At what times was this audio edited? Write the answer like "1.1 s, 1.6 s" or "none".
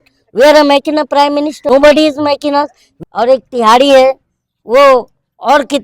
1.6 s, 2.9 s